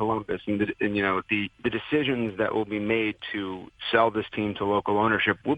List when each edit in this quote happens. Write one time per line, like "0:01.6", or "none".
0:01.5
0:03.8